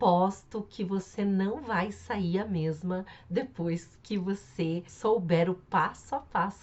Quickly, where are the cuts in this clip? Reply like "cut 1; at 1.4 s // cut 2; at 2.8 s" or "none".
cut 1; at 4.9 s